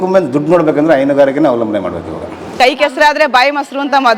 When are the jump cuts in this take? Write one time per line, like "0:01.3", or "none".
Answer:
0:02.6